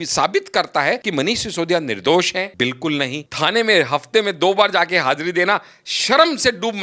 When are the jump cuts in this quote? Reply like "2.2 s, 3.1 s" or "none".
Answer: 1.0 s, 2.5 s, 3.2 s